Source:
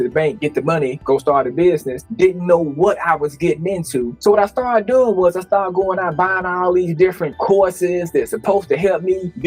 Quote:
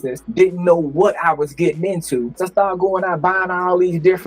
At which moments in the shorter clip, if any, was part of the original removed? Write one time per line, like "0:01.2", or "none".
0:02.4